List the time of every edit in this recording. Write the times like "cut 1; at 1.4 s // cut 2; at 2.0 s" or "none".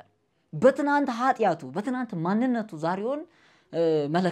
none